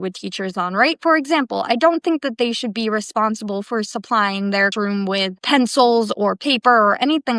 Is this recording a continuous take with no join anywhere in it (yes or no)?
no